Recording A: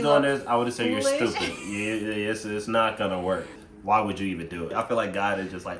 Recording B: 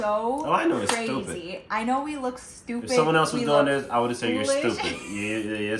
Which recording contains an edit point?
A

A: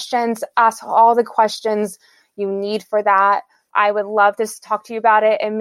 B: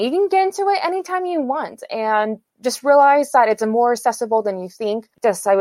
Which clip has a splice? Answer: A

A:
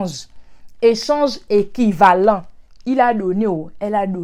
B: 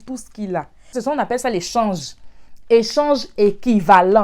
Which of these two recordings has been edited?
B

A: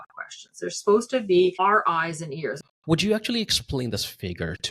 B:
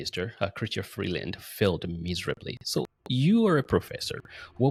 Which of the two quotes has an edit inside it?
A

